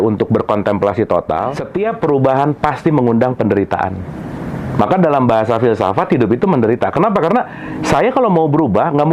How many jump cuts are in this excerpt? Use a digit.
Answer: 1